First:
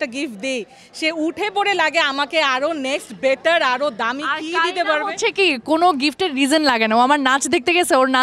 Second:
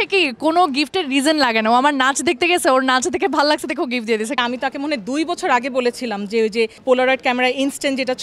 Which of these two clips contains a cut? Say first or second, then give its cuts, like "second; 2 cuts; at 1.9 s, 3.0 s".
second; 2 cuts; at 4.4 s, 6.8 s